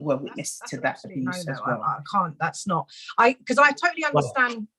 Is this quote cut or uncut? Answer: cut